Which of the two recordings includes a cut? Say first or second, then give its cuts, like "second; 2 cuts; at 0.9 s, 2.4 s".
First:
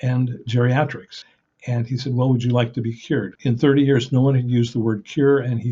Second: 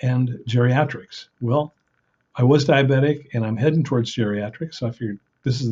first; 2 cuts; at 1.3 s, 3.3 s